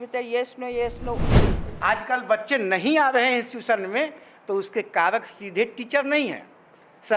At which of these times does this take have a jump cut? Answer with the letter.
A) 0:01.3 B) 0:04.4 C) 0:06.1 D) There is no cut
A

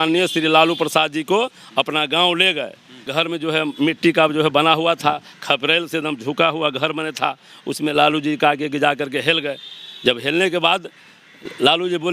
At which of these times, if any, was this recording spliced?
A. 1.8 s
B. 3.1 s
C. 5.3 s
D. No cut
B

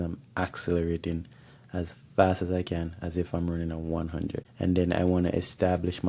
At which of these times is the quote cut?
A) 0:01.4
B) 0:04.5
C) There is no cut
B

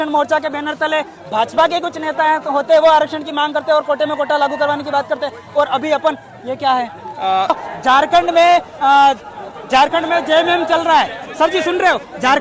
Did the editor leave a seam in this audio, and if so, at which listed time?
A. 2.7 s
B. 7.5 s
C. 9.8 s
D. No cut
B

